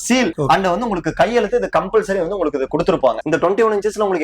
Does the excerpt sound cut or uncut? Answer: cut